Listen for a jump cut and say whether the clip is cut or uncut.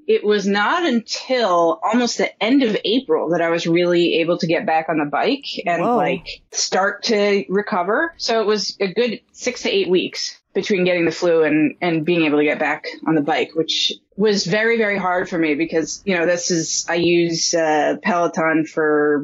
uncut